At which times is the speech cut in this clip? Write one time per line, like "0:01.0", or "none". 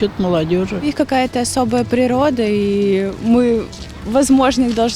0:00.9

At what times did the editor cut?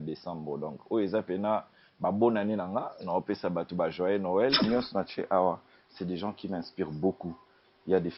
0:04.6

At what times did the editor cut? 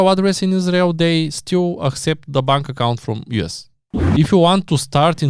0:04.0

